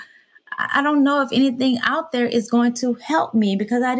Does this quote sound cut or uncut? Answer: uncut